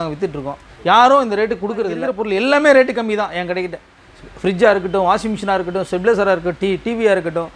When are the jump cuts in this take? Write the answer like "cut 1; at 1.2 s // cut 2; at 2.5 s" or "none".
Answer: cut 1; at 2.1 s